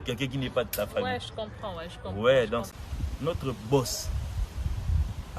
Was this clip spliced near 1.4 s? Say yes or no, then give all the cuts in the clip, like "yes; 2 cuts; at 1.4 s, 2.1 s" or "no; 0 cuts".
no; 1 cut; at 2.7 s